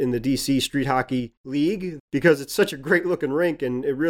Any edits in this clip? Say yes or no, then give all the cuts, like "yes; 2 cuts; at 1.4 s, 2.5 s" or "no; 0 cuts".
yes; 1 cut; at 1.9 s